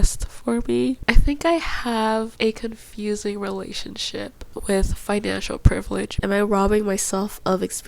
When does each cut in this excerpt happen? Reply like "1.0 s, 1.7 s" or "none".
1.0 s, 2.3 s, 6.2 s